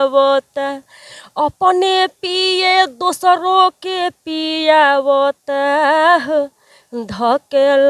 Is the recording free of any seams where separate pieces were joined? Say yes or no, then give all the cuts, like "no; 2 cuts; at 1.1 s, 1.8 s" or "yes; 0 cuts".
yes; 0 cuts